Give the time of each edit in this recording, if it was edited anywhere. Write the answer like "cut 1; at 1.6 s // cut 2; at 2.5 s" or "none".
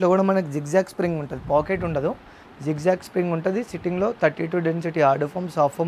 none